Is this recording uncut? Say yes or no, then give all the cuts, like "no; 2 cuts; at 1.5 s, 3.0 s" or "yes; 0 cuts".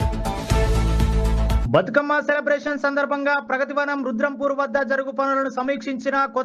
no; 1 cut; at 1.6 s